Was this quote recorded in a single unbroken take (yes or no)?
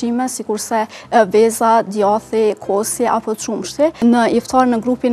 no